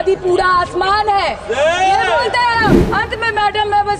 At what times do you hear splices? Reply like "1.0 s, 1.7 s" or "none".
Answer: 2.8 s